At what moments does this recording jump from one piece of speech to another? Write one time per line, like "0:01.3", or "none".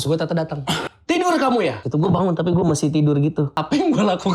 0:00.9
0:01.8
0:03.5